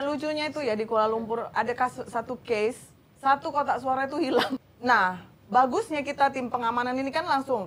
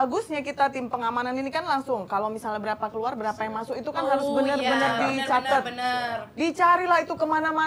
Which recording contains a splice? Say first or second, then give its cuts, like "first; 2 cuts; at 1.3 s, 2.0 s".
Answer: first; 1 cut; at 4.6 s